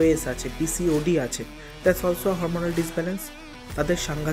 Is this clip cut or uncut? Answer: uncut